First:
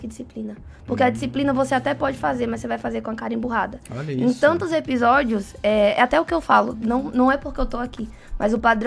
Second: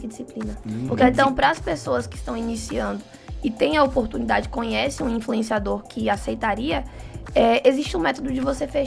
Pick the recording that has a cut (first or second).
second